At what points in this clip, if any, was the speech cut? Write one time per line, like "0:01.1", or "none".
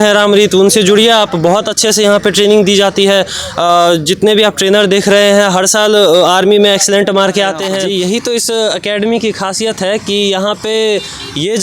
0:07.7